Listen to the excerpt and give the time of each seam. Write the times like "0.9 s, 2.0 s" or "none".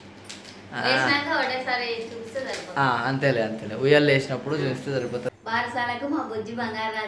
5.3 s